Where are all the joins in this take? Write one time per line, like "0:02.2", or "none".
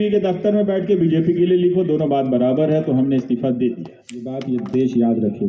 0:04.3